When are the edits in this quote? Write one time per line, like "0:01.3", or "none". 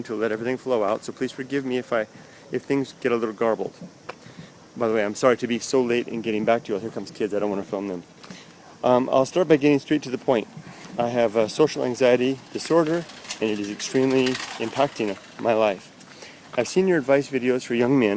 none